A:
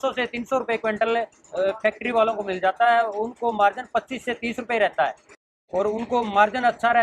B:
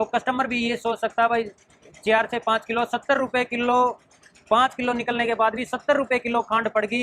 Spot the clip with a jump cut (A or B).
A